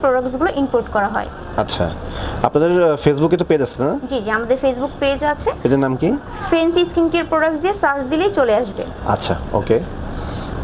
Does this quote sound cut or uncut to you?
uncut